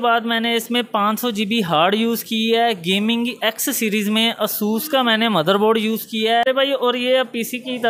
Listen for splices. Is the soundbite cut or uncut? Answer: cut